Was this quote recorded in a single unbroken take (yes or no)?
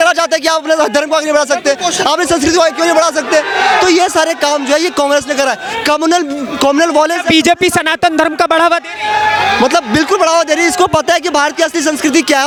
yes